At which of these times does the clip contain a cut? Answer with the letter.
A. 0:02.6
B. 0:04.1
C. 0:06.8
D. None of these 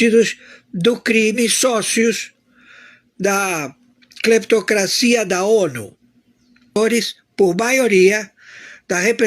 C